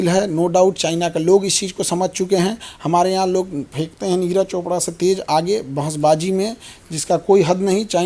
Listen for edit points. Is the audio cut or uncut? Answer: uncut